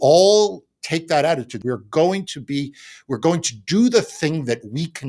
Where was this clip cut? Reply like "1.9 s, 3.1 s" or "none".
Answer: 1.5 s